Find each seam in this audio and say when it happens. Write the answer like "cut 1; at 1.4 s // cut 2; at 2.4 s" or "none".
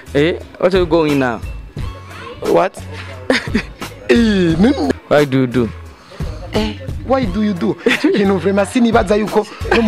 cut 1; at 5.0 s